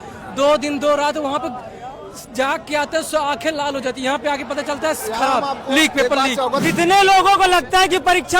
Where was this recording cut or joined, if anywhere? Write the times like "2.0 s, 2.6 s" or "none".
6.6 s